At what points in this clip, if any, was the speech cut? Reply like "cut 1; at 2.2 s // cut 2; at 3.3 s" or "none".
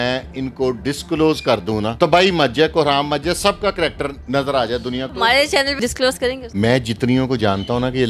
cut 1; at 1.9 s // cut 2; at 4.2 s // cut 3; at 5.1 s // cut 4; at 6.4 s